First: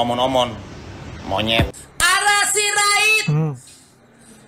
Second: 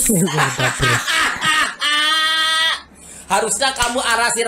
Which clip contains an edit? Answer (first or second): first